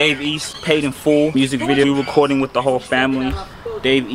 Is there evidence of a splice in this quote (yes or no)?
yes